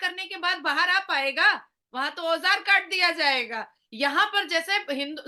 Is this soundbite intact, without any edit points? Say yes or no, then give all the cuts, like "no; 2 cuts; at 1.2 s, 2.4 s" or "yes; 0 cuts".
yes; 0 cuts